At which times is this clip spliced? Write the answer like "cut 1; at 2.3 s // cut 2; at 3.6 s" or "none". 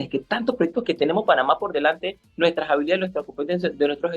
none